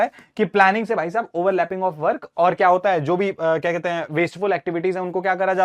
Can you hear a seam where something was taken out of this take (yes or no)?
no